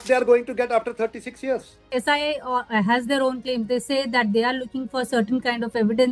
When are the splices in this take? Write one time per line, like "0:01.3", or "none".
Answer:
0:01.8